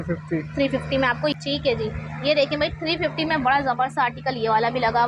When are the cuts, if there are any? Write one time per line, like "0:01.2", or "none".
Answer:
0:01.2